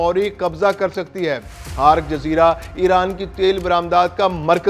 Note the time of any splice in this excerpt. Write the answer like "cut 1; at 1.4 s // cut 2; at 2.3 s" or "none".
cut 1; at 1.6 s